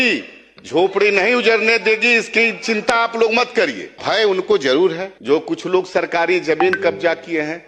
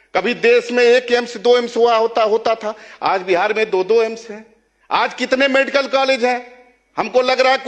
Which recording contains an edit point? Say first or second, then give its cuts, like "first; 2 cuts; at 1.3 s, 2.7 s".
first; 2 cuts; at 4.0 s, 5.1 s